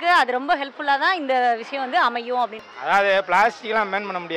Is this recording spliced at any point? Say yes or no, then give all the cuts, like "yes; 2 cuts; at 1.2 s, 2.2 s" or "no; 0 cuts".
yes; 1 cut; at 2.6 s